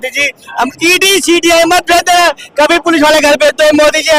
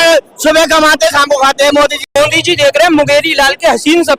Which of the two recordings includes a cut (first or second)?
second